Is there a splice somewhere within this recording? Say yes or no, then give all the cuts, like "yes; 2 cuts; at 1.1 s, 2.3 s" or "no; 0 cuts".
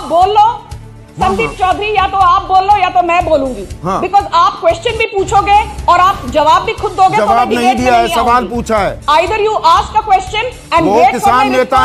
no; 0 cuts